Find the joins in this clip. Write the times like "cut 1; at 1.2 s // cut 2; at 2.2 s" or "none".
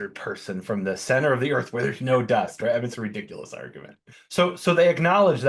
cut 1; at 4.2 s